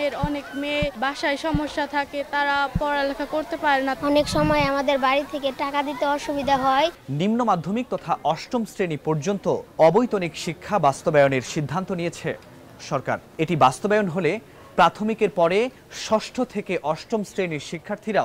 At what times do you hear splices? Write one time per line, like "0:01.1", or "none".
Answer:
0:00.9
0:06.9
0:09.7
0:13.3